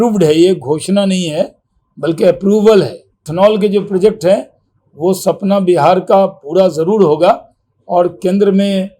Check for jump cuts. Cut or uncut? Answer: cut